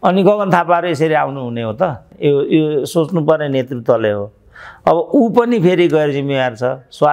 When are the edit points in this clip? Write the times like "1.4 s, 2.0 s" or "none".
2.1 s